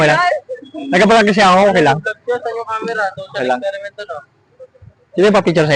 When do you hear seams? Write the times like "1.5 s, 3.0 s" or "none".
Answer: none